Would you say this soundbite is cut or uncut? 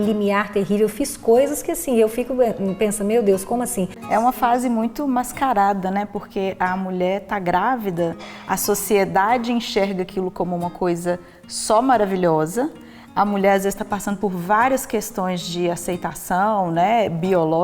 cut